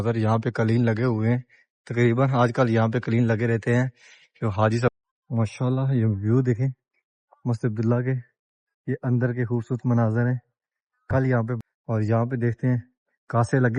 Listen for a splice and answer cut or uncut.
cut